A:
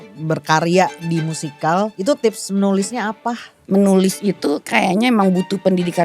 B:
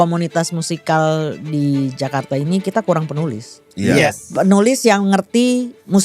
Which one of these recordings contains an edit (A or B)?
A